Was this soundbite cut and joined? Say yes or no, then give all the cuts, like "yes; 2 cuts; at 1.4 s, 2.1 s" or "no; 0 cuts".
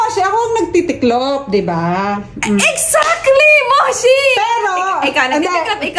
no; 0 cuts